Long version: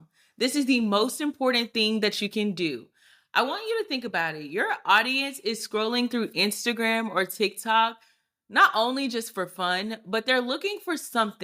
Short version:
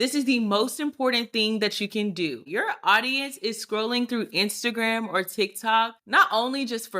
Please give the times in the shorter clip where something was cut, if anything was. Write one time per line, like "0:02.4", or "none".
0:02.4
0:06.0